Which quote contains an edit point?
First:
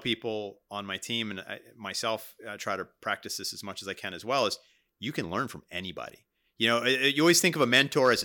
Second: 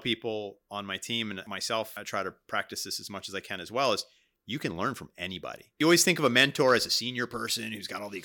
second; 2 cuts; at 1.8 s, 5.8 s

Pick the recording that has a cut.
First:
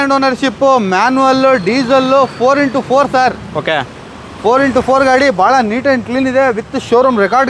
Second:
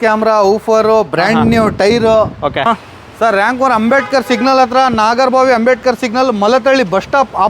second; 1 cut; at 2.7 s

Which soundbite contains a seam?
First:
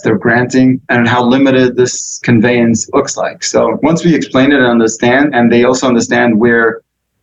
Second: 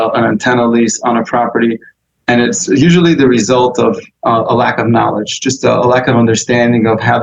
first; 5 cuts; at 0.8 s, 1.7 s, 2.8 s, 3.8 s, 5.3 s

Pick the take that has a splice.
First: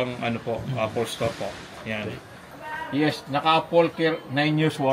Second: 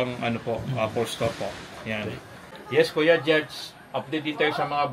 first; 1 cut; at 2.5 s

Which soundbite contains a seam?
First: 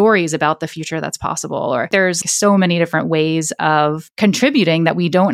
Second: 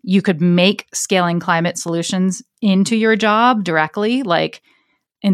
first; 2 cuts; at 2.2 s, 4.0 s

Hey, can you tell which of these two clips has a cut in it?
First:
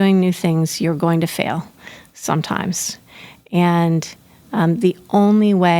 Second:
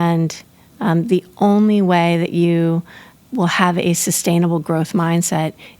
second; 1 cut; at 3.1 s

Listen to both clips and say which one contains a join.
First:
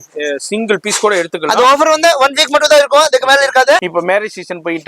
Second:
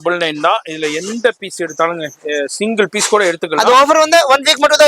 first; 1 cut; at 3.9 s

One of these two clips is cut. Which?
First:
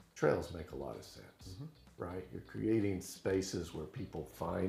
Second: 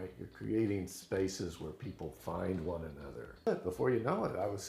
second; 1 cut; at 3.5 s

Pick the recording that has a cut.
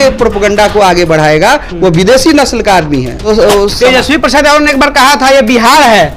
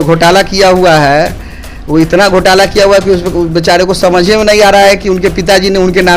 first; 1 cut; at 3.3 s

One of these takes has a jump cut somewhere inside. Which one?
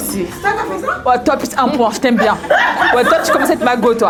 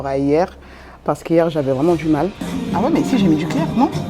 second; 1 cut; at 2.6 s

